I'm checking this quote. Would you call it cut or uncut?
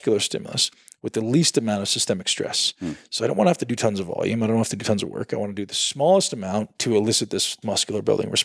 cut